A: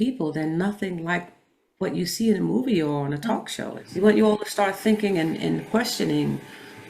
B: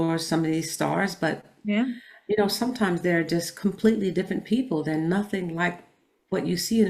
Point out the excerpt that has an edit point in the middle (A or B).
A